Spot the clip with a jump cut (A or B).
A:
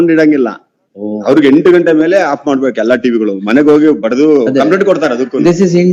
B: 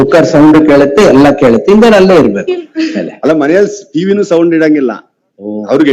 B